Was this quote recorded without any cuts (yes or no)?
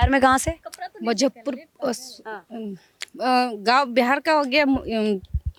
yes